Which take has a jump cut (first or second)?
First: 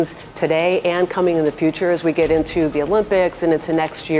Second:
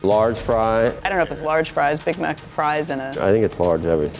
second